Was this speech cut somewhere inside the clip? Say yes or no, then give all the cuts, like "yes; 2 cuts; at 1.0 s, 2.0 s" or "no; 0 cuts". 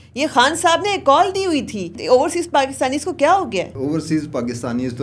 yes; 2 cuts; at 1.9 s, 3.7 s